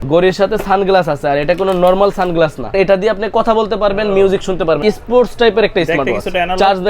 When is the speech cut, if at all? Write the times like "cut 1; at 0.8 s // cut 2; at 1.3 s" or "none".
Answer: cut 1; at 2.7 s // cut 2; at 4.8 s